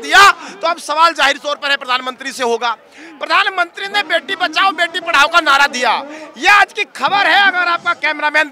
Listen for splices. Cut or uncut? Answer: uncut